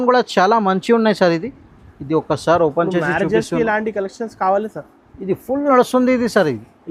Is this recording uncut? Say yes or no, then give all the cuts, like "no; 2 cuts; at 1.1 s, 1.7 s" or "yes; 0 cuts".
yes; 0 cuts